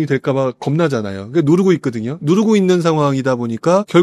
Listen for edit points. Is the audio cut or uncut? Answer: uncut